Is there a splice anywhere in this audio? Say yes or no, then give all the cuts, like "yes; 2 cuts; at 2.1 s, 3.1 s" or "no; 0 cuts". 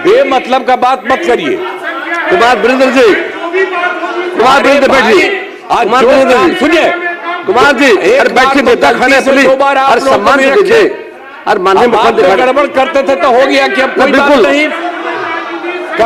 no; 0 cuts